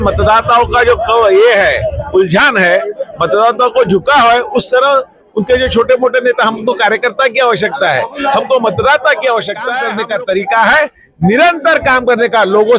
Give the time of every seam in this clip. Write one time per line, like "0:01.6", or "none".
0:09.7